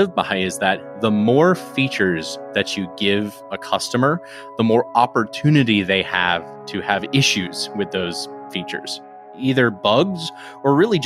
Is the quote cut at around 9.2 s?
yes; 1 cut; at 9.2 s

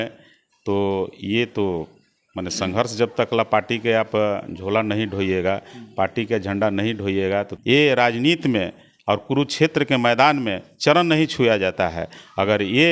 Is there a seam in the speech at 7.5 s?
yes; 1 cut; at 7.5 s

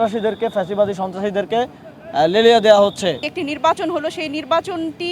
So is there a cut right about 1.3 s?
no; 1 cut; at 3.3 s

